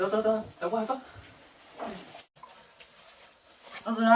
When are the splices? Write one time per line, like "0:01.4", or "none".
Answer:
0:02.3